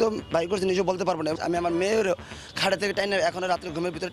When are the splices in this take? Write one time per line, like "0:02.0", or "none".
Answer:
0:01.3